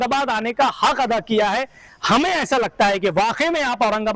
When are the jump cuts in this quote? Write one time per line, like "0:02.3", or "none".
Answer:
none